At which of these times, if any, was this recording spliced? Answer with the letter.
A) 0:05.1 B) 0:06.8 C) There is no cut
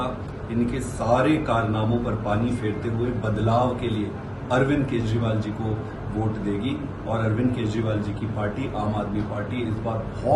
C